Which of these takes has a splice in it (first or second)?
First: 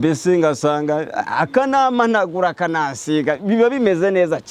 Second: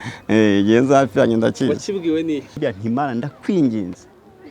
second